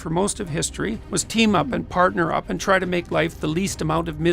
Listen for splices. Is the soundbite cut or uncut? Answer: cut